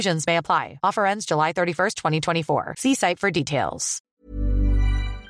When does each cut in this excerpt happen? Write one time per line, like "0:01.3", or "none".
0:04.2